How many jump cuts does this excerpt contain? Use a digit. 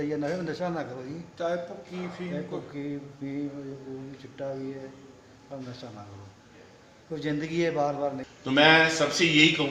1